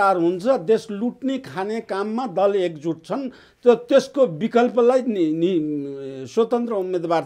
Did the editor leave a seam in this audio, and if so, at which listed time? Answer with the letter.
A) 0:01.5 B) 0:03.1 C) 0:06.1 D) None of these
D